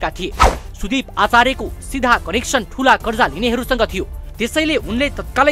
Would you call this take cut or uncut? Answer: uncut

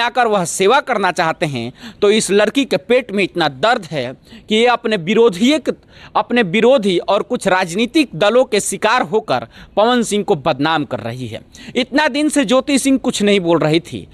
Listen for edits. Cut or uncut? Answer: uncut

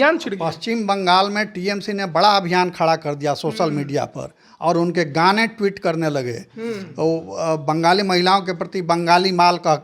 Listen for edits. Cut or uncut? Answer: uncut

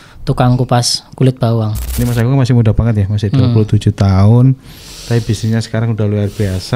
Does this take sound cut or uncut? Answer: cut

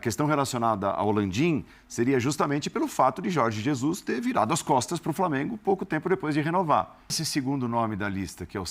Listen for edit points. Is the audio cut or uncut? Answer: cut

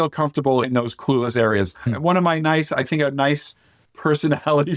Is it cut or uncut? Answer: uncut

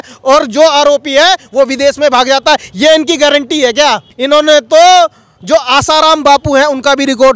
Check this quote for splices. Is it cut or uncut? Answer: cut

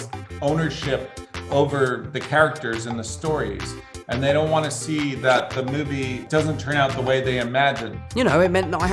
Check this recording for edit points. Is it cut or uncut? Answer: cut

